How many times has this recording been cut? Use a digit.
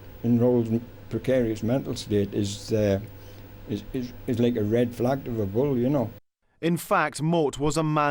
0